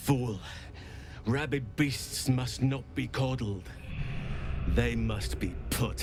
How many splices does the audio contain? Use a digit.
0